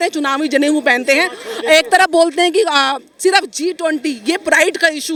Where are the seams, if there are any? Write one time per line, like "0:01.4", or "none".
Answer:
none